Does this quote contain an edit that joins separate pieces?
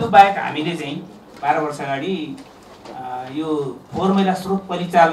yes; 1 cut; at 1.2 s

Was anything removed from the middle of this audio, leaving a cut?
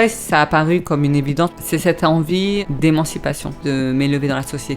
yes; 3 cuts; at 1.6 s, 2.7 s, 3.6 s

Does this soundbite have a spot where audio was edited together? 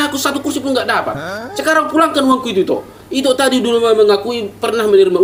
no; 0 cuts

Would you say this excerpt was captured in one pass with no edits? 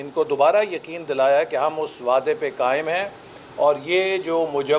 yes; 0 cuts

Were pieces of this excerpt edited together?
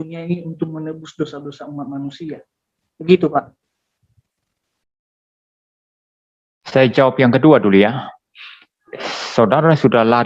no; 0 cuts

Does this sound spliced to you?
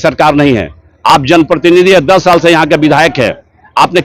no; 0 cuts

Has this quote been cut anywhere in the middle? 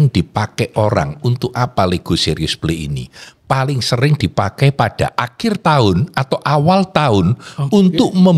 no; 0 cuts

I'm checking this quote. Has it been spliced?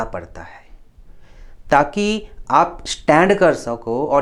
no; 0 cuts

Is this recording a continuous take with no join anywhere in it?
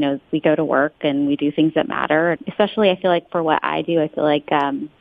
no; 1 cut; at 2.4 s

